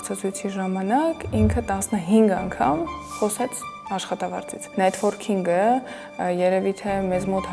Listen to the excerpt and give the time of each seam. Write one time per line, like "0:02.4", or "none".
0:04.6

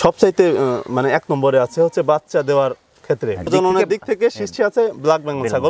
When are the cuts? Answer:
none

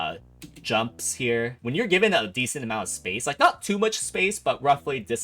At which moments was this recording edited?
0:01.6

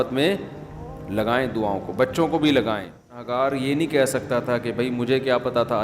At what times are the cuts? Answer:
0:03.2

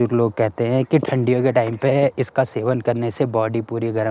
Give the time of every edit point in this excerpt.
none

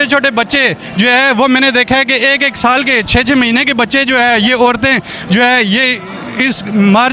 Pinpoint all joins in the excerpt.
none

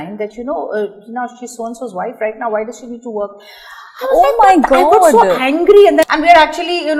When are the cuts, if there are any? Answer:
0:06.1

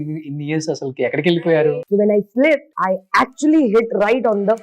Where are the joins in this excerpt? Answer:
0:01.6
0:02.7

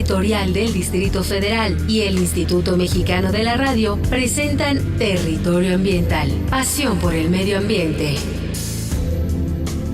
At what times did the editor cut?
0:06.5

